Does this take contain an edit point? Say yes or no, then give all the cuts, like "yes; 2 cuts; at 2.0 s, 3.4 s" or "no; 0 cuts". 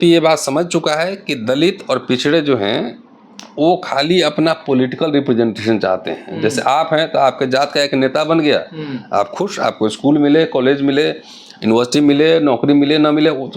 no; 0 cuts